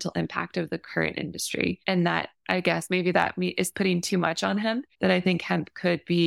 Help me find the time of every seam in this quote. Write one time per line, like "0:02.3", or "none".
0:02.1
0:04.9